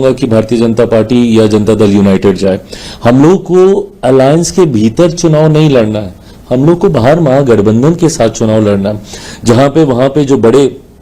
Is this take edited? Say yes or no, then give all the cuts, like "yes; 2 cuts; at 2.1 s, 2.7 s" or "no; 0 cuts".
no; 0 cuts